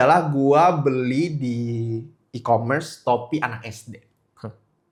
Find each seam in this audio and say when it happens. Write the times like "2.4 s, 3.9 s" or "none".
none